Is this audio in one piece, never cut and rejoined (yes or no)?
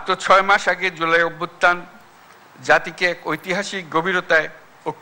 yes